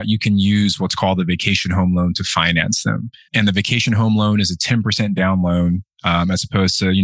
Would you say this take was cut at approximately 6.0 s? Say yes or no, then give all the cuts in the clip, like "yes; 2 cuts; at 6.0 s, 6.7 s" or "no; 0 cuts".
no; 1 cut; at 3.3 s